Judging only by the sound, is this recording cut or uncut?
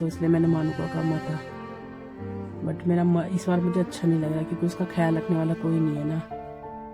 uncut